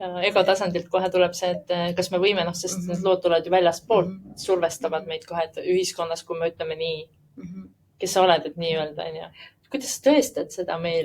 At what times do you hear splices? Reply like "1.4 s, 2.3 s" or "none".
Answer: none